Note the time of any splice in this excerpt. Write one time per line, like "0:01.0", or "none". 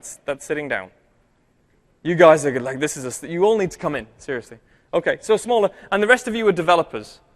0:02.6